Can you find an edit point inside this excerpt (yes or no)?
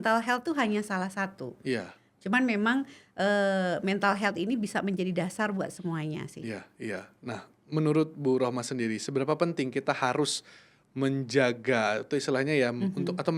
no